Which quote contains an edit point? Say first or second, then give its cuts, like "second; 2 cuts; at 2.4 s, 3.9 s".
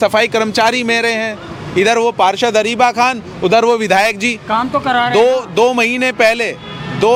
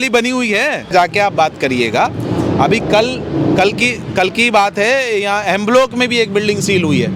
second; 1 cut; at 0.9 s